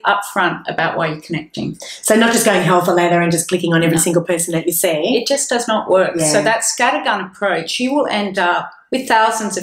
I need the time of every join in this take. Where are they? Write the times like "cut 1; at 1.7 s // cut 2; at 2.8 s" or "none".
none

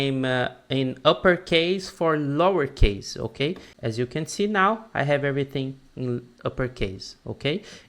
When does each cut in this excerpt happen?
cut 1; at 3.7 s

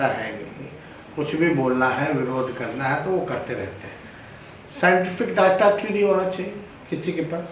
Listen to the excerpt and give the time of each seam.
none

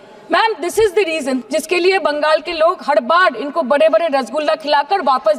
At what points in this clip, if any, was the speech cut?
cut 1; at 1.4 s

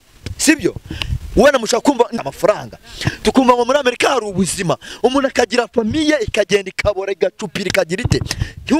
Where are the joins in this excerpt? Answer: cut 1; at 2.1 s

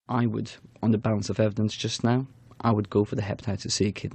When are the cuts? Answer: cut 1; at 1.0 s

